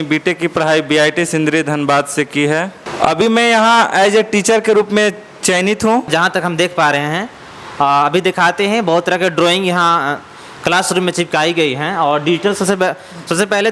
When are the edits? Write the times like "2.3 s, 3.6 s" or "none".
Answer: 2.8 s, 6.1 s